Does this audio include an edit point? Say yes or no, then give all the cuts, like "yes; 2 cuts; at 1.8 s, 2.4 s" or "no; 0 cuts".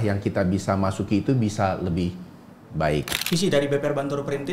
yes; 1 cut; at 3.2 s